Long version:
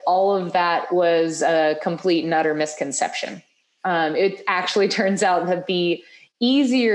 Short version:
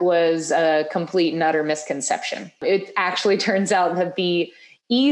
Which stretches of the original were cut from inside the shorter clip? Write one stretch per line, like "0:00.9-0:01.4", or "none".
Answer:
0:03.5-0:04.1